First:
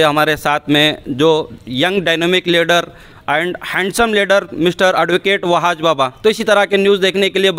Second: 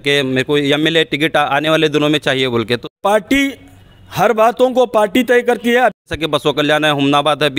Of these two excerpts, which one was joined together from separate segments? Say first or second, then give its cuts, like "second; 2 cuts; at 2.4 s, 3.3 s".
second; 2 cuts; at 2.9 s, 6.0 s